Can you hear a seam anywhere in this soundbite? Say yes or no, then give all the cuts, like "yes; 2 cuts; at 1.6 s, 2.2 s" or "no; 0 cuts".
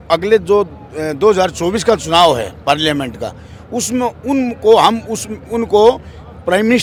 no; 0 cuts